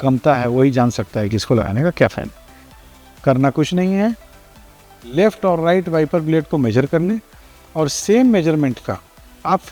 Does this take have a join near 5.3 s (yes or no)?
no